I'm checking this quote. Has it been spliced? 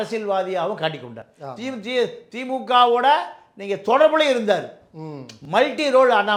no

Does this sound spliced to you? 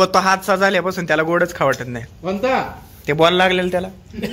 no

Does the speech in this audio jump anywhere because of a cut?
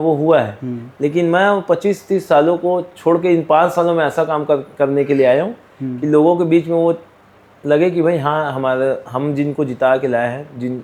no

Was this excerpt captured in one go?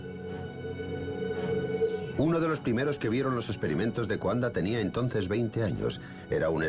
no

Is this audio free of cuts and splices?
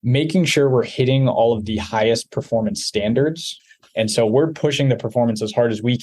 no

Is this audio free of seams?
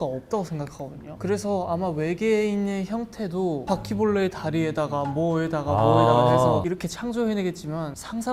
yes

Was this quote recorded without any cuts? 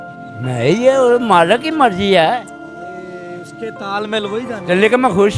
yes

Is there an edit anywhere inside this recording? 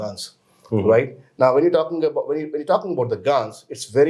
no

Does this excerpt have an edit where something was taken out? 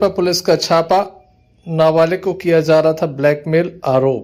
no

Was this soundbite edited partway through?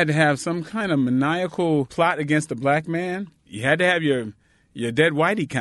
yes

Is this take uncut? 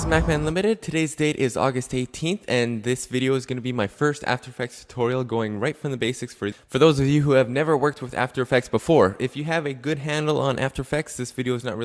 no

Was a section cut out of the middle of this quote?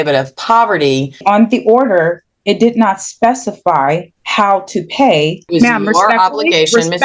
yes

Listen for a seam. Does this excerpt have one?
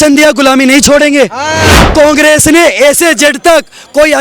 yes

